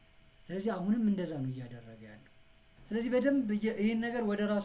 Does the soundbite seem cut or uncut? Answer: cut